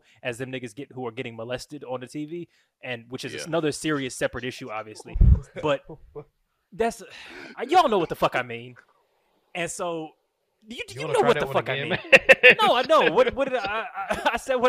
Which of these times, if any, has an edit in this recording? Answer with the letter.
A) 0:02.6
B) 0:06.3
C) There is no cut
C